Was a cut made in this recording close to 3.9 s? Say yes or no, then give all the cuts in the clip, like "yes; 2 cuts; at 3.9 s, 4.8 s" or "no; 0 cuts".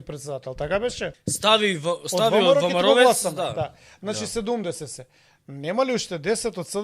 no; 1 cut; at 1.2 s